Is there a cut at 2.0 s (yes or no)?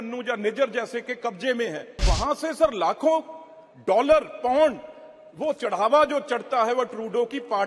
yes